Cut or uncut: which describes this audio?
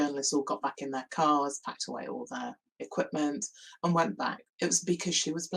uncut